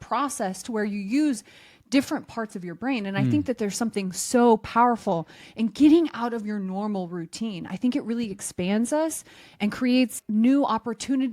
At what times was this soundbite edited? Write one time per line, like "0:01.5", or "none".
0:10.2